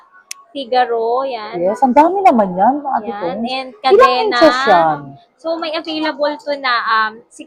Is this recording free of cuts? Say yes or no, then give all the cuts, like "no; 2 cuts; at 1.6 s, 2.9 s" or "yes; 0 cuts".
yes; 0 cuts